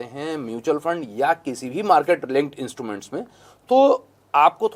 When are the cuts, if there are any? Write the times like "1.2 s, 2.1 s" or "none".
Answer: none